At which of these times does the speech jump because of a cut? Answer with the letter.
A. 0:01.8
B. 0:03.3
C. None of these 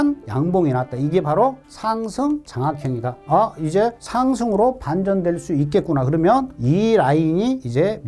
B